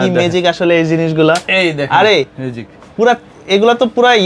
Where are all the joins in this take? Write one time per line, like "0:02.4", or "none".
none